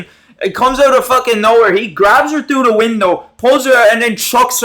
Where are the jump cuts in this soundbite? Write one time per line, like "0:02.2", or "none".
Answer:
none